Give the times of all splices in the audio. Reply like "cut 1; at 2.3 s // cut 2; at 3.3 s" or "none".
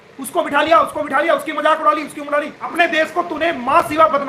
cut 1; at 2.6 s